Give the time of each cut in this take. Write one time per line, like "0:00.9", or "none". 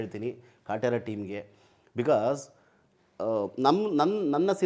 none